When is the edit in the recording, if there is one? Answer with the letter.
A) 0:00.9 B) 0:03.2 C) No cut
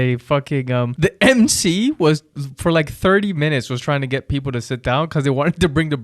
A